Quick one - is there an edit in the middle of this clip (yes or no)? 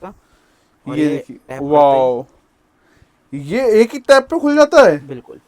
no